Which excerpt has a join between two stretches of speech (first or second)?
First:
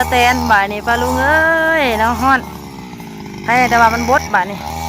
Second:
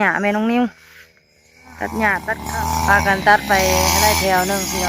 second